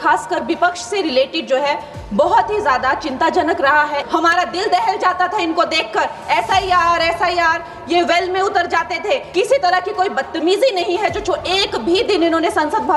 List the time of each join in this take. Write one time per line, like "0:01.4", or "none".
0:04.0
0:09.3